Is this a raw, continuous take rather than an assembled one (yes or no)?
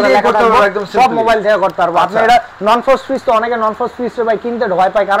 yes